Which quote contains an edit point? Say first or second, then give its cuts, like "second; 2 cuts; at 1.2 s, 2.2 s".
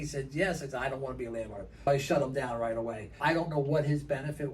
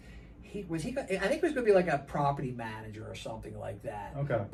first; 2 cuts; at 1.9 s, 3.2 s